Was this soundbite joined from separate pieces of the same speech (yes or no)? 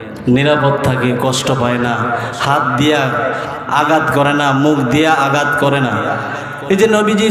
no